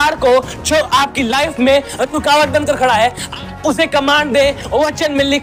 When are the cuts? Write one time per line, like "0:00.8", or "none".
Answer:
none